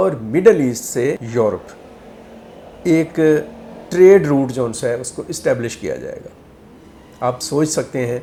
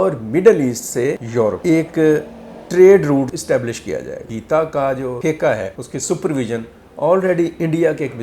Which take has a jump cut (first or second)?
second